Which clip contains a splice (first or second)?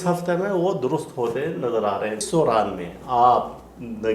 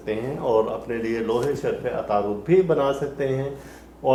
first